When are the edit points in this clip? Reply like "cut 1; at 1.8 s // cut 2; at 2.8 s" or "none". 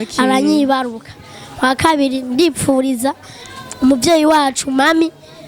none

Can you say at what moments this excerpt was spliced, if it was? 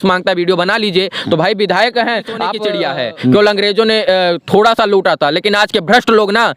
cut 1; at 2.6 s

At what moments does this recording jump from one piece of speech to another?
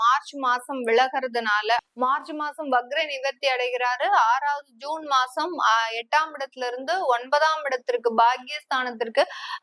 cut 1; at 1.8 s

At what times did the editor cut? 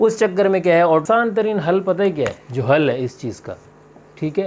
cut 1; at 1.0 s

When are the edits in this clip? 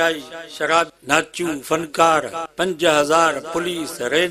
cut 1; at 0.9 s // cut 2; at 2.4 s

